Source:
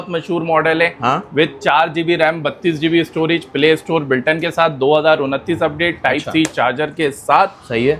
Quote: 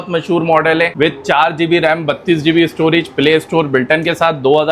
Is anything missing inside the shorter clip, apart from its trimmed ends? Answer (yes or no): yes